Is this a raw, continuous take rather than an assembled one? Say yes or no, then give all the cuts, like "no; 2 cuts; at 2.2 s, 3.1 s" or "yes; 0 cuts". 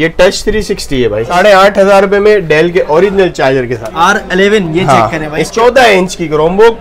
no; 3 cuts; at 1.3 s, 3.8 s, 5.4 s